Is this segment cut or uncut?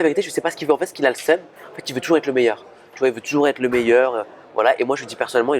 uncut